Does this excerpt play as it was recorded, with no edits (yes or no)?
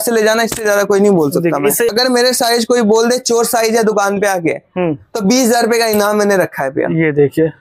no